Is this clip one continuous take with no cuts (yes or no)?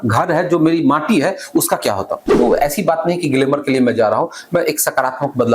no